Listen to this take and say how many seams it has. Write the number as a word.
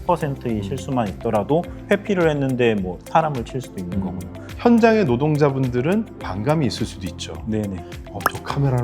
two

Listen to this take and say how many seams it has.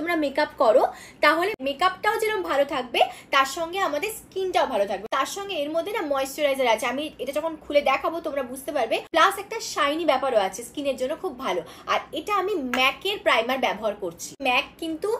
zero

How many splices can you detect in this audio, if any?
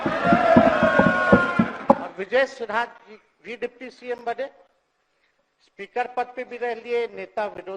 one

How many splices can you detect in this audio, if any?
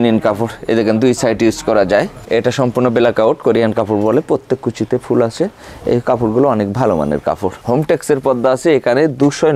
two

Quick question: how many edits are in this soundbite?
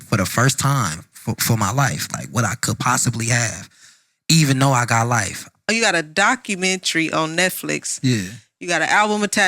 one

